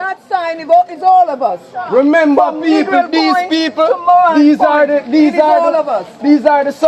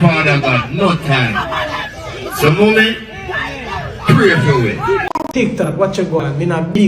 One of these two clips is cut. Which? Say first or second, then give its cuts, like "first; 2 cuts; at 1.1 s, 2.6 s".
second; 1 cut; at 5.1 s